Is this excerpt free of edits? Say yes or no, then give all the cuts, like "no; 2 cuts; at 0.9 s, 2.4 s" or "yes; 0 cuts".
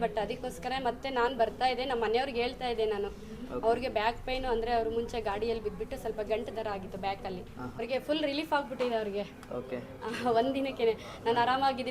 no; 1 cut; at 7.8 s